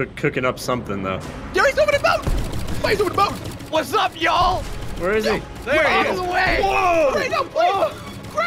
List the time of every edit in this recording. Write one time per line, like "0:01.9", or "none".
0:01.3